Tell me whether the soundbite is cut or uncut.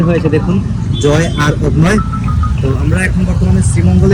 uncut